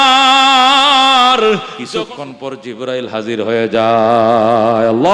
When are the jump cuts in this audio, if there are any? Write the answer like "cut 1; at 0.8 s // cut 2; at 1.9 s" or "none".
cut 1; at 1.8 s